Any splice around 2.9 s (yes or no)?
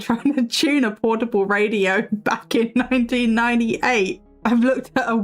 no